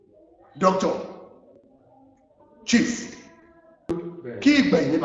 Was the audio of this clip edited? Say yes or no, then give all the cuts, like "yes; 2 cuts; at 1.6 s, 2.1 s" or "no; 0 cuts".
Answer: yes; 1 cut; at 3.9 s